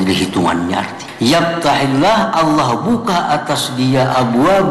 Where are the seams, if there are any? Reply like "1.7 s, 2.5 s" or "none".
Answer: 1.0 s